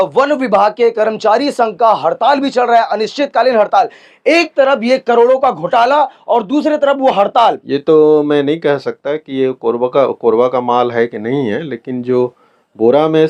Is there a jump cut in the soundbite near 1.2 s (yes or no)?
no